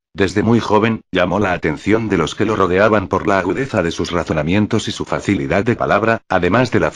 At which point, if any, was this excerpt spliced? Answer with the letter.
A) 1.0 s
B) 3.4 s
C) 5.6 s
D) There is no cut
C